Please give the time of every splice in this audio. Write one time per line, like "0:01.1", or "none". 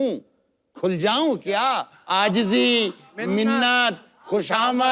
0:02.0